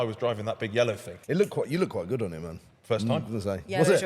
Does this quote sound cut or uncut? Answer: cut